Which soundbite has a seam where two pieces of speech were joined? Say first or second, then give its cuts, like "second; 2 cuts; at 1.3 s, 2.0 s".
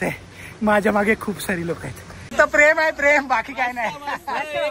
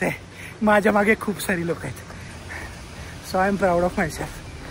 first; 1 cut; at 2.3 s